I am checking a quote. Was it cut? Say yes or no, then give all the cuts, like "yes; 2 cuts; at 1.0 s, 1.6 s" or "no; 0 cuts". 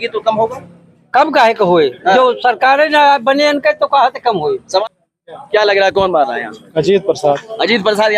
yes; 1 cut; at 4.8 s